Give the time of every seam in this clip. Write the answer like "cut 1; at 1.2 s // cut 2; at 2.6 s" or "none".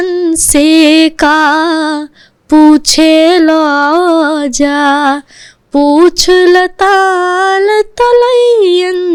none